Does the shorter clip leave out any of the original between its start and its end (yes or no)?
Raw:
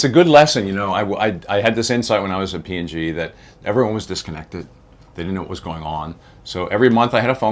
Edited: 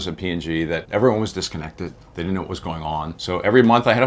yes